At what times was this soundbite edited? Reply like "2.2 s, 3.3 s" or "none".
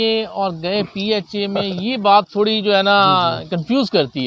none